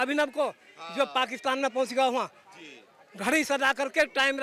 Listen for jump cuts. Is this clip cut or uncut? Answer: uncut